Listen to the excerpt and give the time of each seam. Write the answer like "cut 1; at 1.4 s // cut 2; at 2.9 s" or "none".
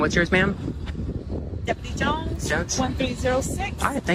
none